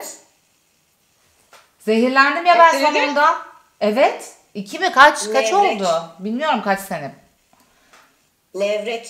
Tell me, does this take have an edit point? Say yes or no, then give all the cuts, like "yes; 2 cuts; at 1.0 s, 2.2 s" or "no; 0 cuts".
no; 0 cuts